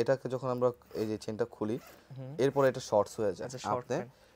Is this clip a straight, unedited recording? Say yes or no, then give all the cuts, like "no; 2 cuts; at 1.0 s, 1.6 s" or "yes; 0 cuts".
yes; 0 cuts